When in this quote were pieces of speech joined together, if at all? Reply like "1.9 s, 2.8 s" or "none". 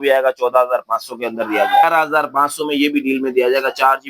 1.8 s